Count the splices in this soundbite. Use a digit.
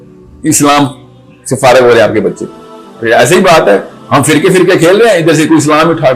1